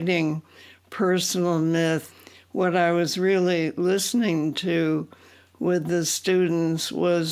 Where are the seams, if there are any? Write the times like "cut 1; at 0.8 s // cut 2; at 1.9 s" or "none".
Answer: cut 1; at 2.1 s